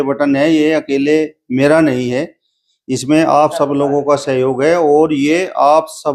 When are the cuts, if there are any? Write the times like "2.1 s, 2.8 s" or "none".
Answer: none